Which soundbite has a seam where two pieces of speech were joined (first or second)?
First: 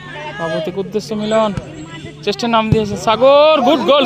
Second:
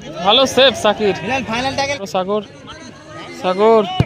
second